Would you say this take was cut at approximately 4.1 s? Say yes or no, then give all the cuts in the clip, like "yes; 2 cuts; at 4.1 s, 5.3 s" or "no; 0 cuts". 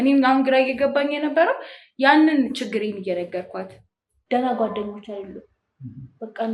yes; 1 cut; at 4.1 s